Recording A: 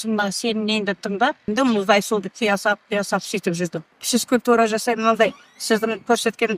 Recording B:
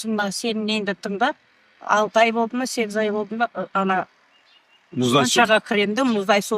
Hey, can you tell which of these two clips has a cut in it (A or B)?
A